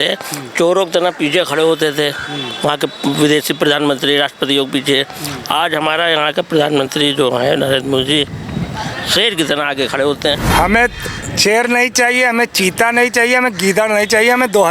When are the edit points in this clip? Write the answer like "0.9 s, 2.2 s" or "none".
10.4 s

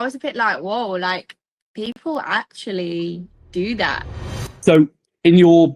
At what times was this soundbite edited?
4.0 s

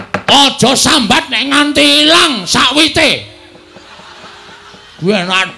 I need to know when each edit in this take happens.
none

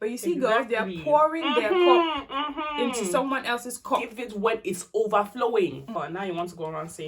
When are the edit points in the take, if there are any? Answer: 6.0 s

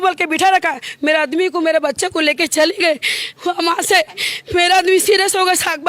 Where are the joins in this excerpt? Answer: none

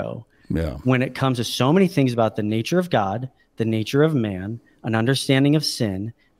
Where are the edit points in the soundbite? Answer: none

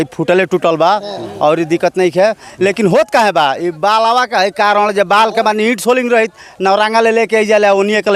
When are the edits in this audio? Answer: none

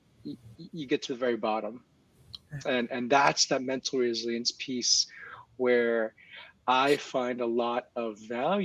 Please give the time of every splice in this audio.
none

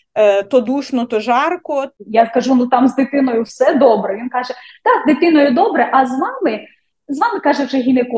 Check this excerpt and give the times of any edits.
2.0 s

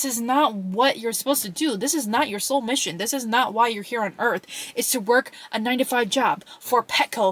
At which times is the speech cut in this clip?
none

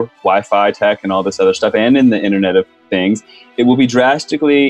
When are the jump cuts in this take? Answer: none

